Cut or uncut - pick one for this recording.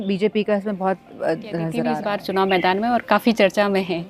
cut